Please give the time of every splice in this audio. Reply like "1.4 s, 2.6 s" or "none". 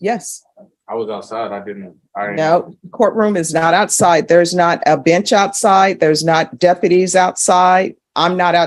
none